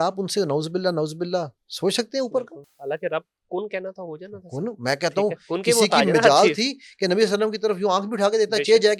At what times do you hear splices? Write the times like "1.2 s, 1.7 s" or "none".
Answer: none